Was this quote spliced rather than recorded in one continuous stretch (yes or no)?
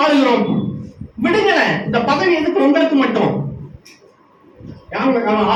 no